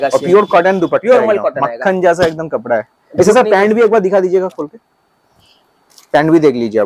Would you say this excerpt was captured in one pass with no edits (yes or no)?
yes